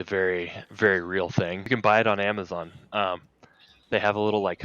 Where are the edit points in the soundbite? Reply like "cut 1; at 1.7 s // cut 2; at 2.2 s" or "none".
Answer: cut 1; at 1.6 s